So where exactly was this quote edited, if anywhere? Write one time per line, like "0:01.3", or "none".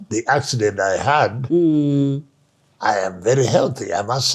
none